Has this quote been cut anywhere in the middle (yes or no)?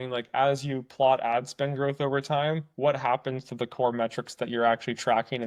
no